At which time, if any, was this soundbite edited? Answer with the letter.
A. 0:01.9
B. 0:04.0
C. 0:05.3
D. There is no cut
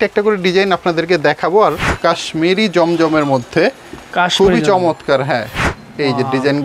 A